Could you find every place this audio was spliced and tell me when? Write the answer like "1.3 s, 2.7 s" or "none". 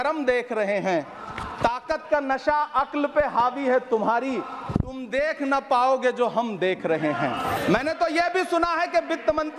7.6 s